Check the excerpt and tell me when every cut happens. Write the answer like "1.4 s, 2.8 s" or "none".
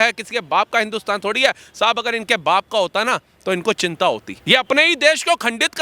none